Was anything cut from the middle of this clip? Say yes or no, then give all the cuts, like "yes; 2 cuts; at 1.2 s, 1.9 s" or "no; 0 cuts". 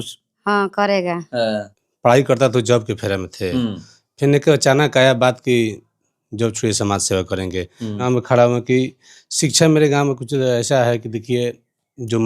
yes; 2 cuts; at 1.6 s, 8.0 s